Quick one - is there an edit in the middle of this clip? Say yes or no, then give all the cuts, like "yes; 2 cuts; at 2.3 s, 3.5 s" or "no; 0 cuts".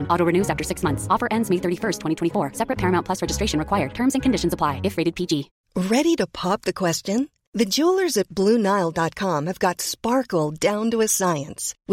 yes; 1 cut; at 5.6 s